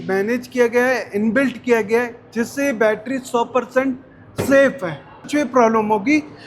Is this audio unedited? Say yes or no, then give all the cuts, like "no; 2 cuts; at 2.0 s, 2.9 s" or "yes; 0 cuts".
no; 1 cut; at 5.3 s